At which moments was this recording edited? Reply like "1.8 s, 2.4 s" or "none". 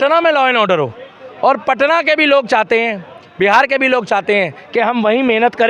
none